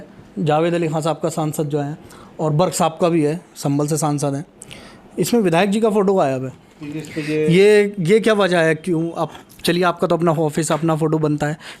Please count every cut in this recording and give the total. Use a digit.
0